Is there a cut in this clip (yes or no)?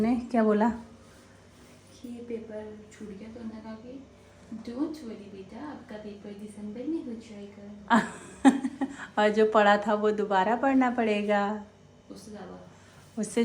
no